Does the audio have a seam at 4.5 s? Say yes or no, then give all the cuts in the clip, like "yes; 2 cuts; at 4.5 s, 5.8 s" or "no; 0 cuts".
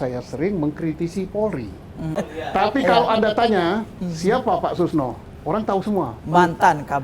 no; 1 cut; at 2.2 s